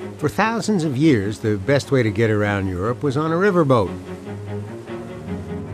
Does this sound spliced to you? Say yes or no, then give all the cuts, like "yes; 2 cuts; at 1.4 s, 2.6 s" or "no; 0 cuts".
yes; 1 cut; at 3.9 s